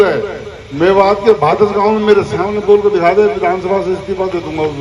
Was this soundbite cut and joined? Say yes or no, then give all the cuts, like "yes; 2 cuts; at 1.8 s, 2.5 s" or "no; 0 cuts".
no; 0 cuts